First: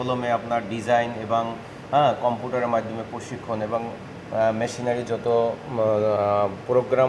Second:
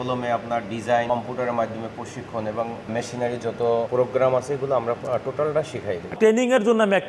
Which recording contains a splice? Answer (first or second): second